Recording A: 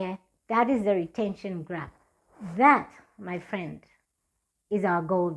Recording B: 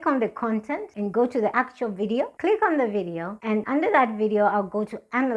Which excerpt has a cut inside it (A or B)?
B